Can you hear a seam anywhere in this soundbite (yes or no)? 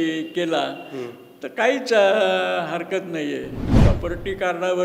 yes